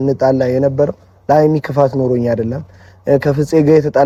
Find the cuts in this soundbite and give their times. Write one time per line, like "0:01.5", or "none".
none